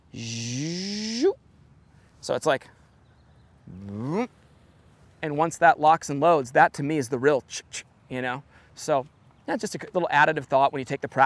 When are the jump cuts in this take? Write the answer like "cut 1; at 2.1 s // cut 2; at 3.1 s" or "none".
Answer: none